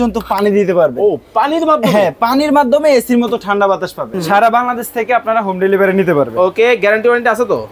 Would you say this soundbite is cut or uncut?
cut